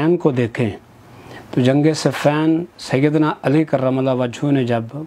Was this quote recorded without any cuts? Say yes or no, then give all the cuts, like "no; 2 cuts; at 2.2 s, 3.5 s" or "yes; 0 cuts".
yes; 0 cuts